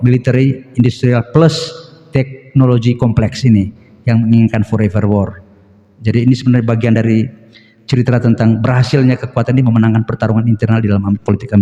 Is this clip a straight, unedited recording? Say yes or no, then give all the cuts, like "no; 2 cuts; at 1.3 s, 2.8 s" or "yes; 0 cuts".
yes; 0 cuts